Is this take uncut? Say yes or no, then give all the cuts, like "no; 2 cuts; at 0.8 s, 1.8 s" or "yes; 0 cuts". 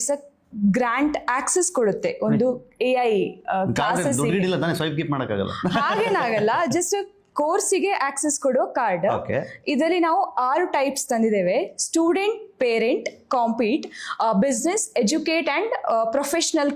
yes; 0 cuts